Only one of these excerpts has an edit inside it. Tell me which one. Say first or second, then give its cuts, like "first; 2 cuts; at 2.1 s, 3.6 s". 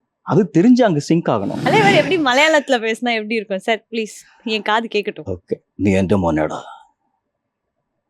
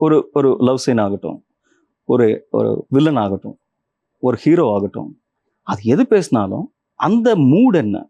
first; 1 cut; at 1.7 s